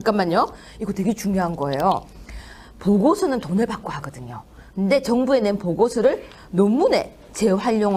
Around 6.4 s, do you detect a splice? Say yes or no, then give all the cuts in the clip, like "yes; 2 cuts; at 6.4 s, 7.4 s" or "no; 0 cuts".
no; 0 cuts